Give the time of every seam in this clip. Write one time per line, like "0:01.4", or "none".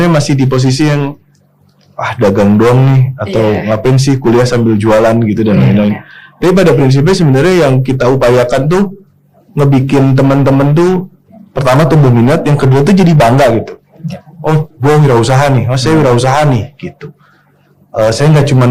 none